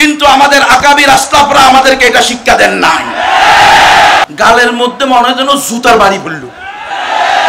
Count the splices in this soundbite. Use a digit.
1